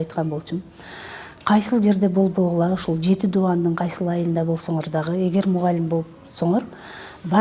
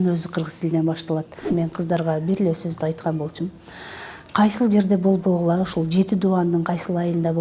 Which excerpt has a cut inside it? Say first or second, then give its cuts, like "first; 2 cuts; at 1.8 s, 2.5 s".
second; 1 cut; at 1.5 s